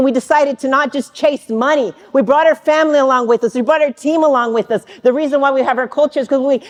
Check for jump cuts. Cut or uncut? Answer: uncut